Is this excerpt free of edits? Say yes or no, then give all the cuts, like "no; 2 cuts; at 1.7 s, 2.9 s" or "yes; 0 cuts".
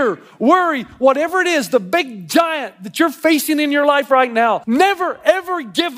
no; 1 cut; at 4.6 s